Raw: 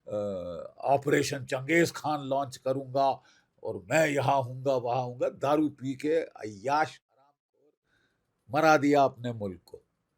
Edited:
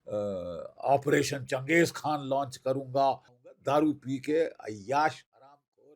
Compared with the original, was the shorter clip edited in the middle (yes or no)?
yes